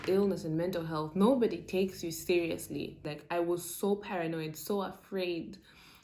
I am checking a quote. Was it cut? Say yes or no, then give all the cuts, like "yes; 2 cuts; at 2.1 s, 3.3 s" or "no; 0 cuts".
yes; 1 cut; at 3.1 s